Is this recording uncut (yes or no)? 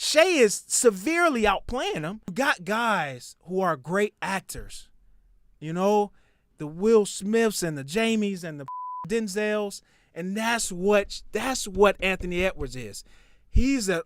no